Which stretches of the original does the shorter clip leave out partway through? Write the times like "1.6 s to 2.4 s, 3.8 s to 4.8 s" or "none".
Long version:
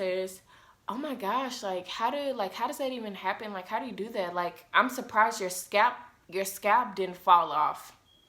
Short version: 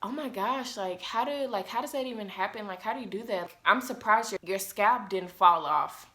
4.3 s to 4.5 s, 5.4 s to 6.2 s